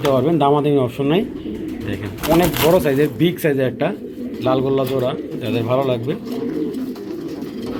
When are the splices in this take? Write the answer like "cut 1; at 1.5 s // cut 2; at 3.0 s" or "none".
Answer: none